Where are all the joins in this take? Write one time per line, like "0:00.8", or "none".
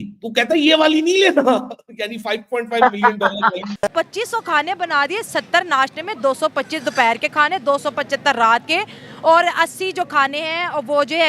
0:03.7